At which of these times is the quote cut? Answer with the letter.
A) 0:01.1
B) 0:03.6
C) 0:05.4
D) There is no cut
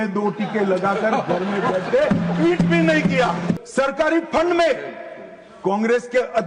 B